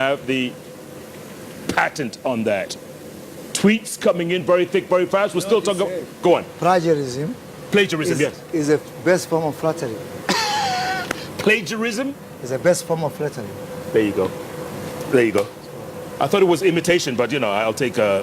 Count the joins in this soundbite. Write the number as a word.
one